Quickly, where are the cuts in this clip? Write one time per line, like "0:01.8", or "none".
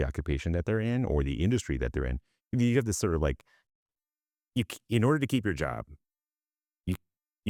none